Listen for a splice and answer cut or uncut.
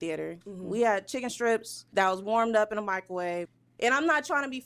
cut